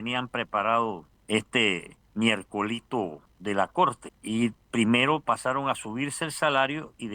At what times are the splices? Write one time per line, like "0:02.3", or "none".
0:01.1
0:02.0
0:03.3
0:04.1